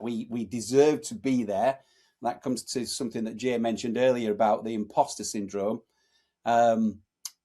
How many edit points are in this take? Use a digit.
0